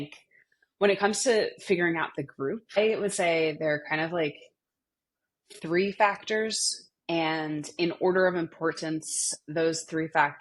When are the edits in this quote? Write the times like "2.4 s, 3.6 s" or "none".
2.8 s